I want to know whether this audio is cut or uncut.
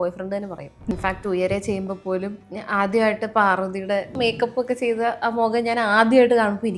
cut